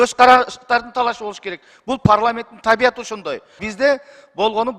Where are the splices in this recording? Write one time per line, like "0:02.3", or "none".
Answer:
0:03.6